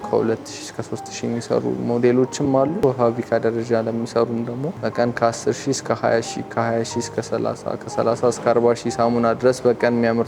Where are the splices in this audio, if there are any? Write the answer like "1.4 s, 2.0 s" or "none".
2.8 s, 4.8 s